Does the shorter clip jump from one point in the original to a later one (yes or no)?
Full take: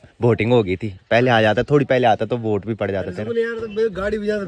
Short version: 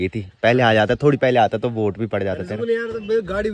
no